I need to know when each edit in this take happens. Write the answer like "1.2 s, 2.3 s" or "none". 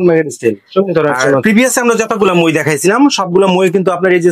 1.4 s